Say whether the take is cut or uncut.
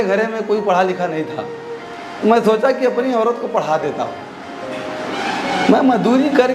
uncut